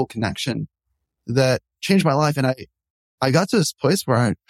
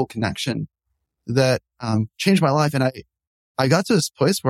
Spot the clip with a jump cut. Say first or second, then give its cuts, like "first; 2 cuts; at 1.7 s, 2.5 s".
first; 1 cut; at 1.8 s